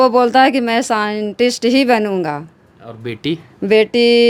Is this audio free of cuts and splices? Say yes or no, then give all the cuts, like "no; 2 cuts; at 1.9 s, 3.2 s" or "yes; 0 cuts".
yes; 0 cuts